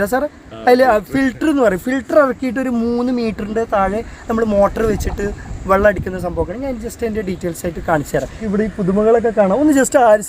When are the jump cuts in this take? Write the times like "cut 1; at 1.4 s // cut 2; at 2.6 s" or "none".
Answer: cut 1; at 8.4 s